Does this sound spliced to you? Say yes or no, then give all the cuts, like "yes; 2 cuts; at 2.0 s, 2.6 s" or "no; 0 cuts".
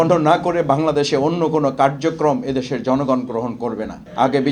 no; 0 cuts